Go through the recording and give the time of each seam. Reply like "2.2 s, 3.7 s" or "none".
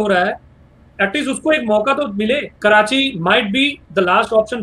2.5 s